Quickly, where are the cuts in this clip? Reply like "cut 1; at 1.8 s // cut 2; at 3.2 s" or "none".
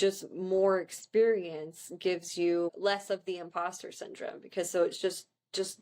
cut 1; at 2.8 s